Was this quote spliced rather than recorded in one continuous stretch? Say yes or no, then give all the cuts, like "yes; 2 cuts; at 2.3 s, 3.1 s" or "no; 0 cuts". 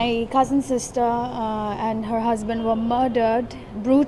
no; 0 cuts